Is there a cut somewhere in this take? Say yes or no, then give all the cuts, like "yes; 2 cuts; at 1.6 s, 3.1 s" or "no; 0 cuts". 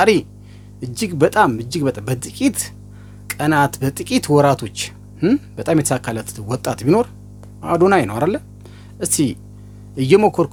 no; 0 cuts